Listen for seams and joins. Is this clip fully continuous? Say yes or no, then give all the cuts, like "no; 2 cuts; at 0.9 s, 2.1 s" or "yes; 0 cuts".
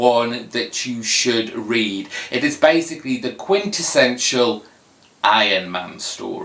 yes; 0 cuts